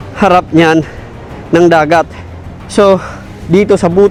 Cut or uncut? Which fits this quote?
uncut